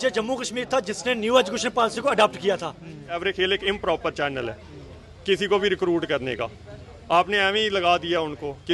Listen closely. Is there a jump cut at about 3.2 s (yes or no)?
yes